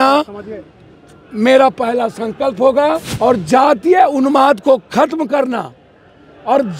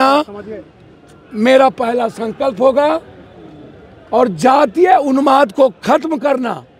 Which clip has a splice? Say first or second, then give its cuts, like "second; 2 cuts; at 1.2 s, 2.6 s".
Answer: first; 1 cut; at 3.1 s